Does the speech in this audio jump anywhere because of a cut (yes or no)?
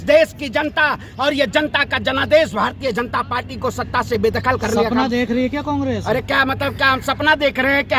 no